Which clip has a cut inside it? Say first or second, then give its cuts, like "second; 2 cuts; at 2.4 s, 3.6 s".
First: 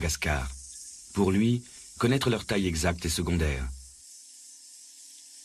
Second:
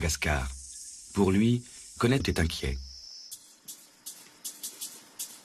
first; 1 cut; at 2.2 s